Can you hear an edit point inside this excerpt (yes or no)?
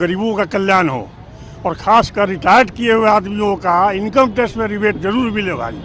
no